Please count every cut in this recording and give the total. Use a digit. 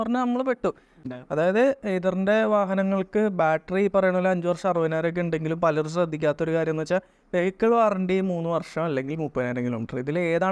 1